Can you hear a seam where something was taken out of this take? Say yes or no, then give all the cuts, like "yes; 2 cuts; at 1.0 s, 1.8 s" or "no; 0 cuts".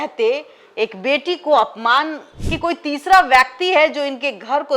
yes; 1 cut; at 2.2 s